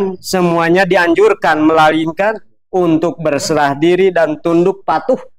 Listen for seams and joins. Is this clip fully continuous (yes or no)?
yes